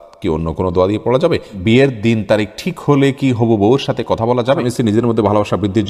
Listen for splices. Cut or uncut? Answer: cut